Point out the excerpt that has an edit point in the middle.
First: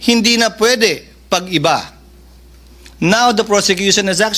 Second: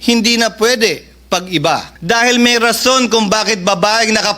second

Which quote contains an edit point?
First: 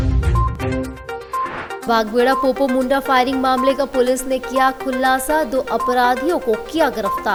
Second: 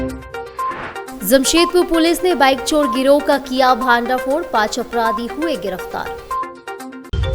second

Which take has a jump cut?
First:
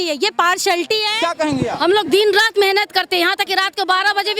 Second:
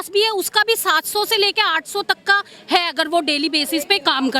first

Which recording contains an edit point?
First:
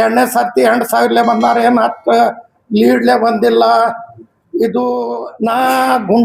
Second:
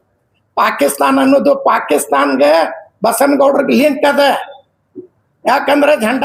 first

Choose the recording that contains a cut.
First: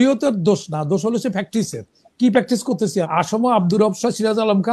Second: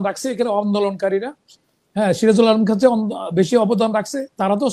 first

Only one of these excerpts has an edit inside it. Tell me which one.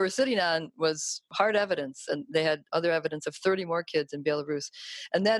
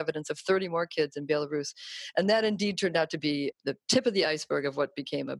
first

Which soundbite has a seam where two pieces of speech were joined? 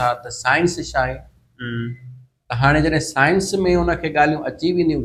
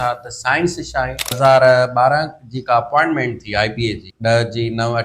second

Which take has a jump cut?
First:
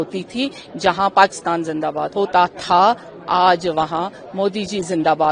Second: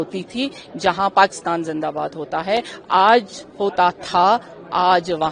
first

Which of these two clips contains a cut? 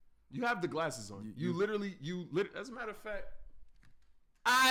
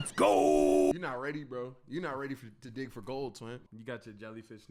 second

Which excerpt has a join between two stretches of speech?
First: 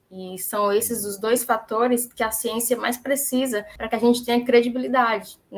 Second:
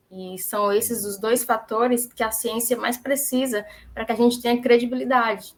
first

